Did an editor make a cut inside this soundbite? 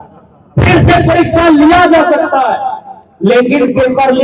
no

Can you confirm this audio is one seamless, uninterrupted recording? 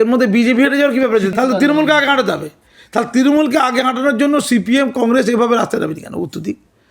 no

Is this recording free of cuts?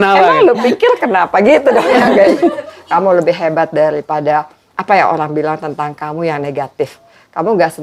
no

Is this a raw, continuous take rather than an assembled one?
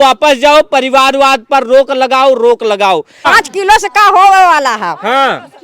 no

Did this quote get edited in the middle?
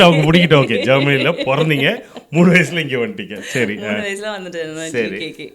no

